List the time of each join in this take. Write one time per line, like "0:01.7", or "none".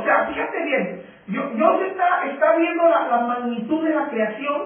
0:01.8